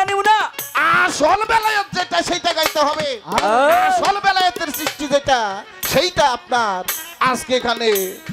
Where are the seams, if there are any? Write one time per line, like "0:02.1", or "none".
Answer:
none